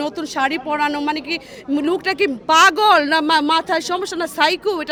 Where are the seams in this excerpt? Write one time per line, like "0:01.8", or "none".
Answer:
none